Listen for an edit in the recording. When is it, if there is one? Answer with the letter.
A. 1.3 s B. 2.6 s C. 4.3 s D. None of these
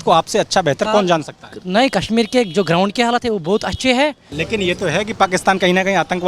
C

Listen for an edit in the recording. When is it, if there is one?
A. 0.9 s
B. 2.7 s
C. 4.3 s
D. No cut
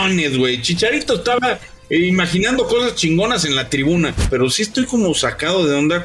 C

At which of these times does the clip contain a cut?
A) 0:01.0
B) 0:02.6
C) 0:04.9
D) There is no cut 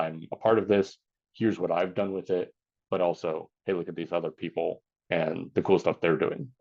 C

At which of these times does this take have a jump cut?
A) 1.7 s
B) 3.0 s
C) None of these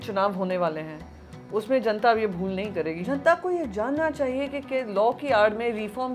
B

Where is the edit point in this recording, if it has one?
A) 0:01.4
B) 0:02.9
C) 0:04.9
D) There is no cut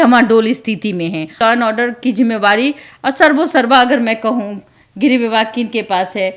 A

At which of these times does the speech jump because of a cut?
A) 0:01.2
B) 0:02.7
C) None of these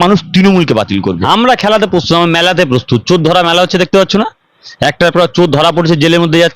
A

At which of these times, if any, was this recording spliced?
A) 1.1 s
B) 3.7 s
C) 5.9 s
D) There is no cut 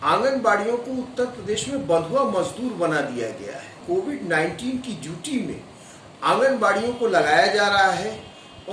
B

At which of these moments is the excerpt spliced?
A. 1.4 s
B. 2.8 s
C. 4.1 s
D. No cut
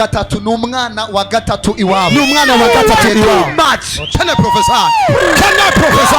C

